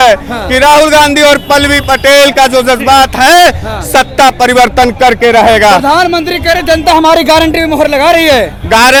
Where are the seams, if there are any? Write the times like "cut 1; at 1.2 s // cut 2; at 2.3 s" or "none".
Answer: none